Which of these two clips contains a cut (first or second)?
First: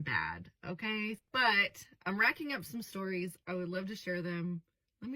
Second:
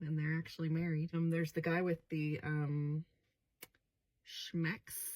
second